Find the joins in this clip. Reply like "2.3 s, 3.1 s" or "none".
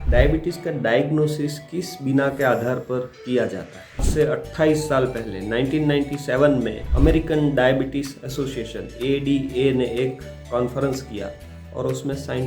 4.1 s